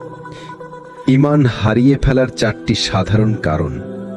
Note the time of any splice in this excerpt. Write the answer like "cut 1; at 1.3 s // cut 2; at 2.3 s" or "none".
cut 1; at 1.0 s

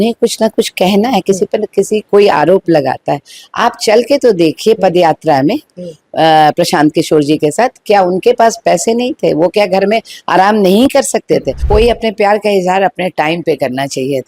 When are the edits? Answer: cut 1; at 11.5 s

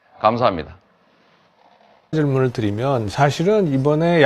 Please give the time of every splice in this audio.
cut 1; at 2.8 s

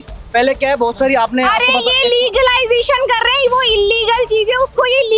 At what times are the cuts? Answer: none

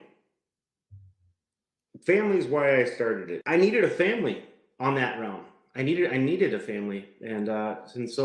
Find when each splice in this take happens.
cut 1; at 3.3 s

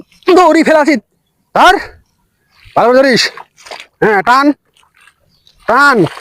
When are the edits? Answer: none

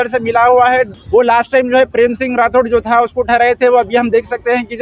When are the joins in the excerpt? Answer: cut 1; at 1.0 s

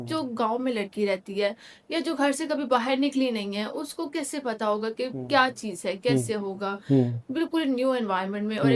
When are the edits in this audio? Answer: none

